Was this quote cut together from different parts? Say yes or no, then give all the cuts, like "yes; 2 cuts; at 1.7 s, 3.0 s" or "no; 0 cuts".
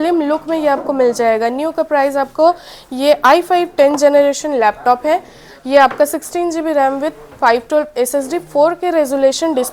no; 0 cuts